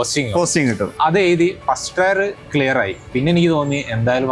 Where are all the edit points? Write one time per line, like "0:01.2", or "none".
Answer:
0:00.9
0:03.0